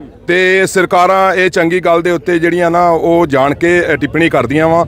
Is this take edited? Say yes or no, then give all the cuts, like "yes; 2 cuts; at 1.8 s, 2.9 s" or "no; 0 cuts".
no; 0 cuts